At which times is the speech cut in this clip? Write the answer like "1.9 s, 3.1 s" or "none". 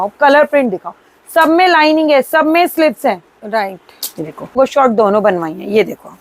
4.5 s